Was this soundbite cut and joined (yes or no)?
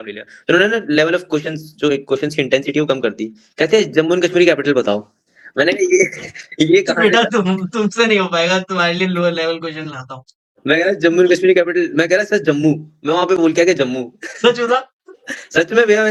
no